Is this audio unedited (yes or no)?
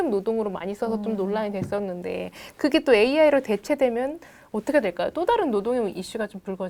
yes